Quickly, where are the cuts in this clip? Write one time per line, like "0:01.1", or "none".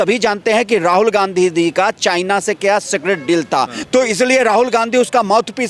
0:03.8

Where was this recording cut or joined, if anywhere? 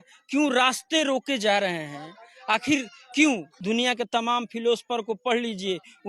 0:03.5

